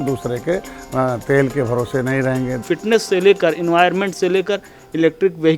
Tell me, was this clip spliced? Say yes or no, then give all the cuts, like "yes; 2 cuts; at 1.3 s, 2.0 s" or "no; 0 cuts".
yes; 1 cut; at 2.6 s